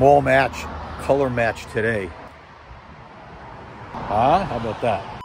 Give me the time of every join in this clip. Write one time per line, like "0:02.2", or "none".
0:02.3
0:03.9